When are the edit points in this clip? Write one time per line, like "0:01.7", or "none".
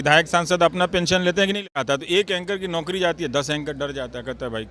0:01.6